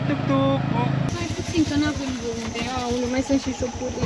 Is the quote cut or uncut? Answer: cut